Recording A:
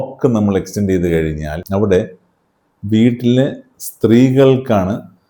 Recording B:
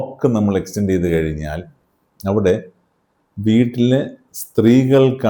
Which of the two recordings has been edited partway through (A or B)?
A